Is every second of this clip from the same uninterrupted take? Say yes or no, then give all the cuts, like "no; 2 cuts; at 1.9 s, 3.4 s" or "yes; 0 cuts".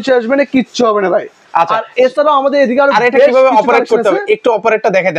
yes; 0 cuts